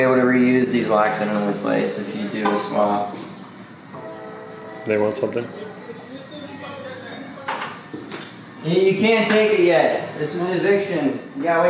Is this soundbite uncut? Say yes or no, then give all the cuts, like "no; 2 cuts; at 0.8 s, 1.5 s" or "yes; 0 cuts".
yes; 0 cuts